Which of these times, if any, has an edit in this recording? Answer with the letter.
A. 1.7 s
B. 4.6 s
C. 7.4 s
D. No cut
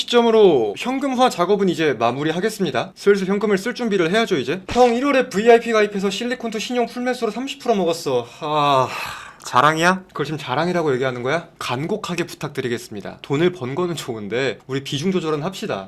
B